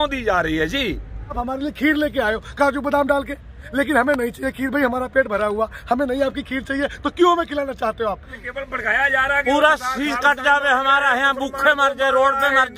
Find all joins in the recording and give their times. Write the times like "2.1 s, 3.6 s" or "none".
1.4 s, 8.4 s